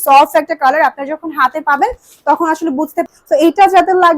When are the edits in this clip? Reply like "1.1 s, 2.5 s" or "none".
3.0 s